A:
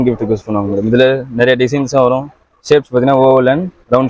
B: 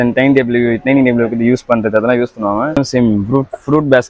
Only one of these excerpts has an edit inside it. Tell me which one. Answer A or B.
B